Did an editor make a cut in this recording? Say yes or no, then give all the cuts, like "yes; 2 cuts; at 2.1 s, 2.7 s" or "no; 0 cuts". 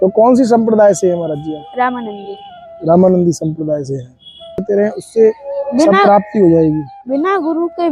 yes; 1 cut; at 4.6 s